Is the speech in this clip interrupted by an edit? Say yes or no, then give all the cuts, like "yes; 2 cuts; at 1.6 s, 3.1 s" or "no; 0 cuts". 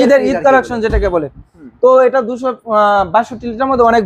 no; 0 cuts